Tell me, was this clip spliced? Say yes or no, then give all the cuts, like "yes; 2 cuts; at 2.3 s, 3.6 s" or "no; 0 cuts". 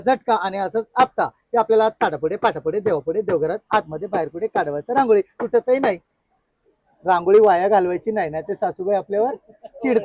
no; 0 cuts